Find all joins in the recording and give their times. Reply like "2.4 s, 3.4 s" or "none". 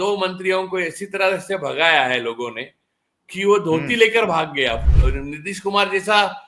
4.8 s